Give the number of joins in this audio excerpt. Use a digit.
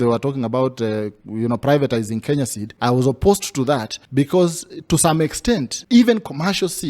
3